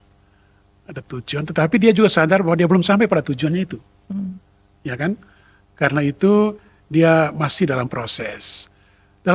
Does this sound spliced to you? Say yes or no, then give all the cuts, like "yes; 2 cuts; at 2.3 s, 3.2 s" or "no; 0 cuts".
no; 0 cuts